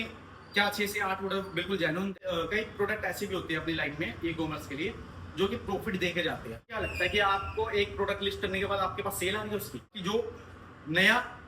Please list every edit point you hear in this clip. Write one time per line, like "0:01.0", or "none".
0:02.2
0:06.8
0:10.0